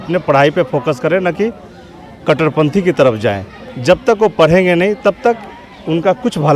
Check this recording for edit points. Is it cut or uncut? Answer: uncut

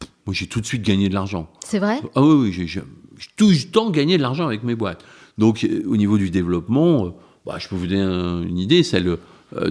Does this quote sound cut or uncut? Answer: uncut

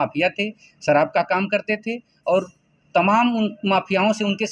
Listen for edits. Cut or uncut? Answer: uncut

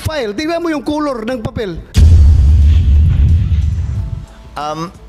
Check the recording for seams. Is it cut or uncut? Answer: cut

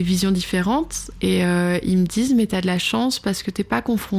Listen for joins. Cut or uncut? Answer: uncut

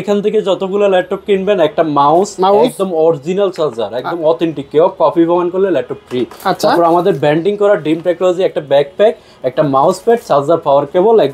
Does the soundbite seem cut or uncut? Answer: uncut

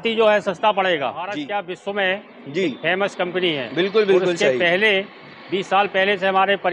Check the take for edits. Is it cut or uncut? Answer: cut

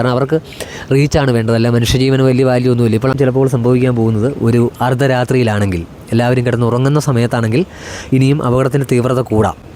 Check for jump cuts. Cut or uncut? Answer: cut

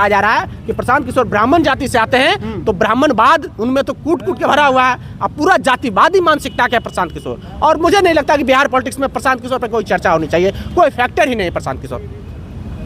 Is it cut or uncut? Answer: uncut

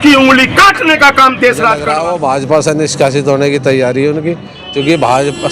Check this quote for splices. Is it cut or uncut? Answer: cut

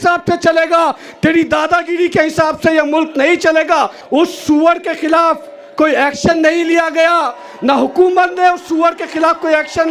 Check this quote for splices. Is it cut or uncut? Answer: cut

